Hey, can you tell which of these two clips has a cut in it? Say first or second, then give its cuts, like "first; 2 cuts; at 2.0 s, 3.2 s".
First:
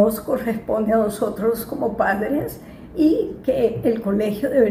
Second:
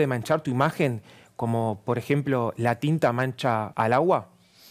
second; 1 cut; at 3.7 s